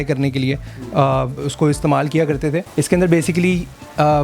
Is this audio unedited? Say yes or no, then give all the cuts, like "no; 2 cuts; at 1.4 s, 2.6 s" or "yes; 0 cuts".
no; 1 cut; at 2.7 s